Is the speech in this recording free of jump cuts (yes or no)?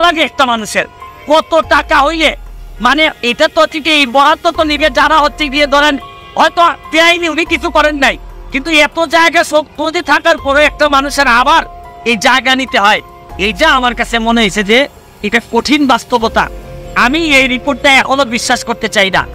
yes